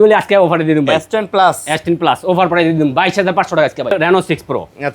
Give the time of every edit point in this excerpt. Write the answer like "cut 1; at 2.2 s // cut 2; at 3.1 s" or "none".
cut 1; at 3.9 s